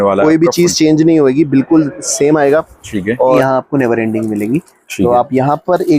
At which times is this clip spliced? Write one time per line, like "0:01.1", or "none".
0:03.4